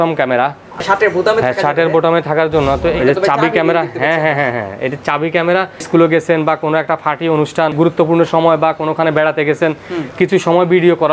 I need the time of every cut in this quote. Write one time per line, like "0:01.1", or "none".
0:00.8
0:02.9
0:05.9
0:07.7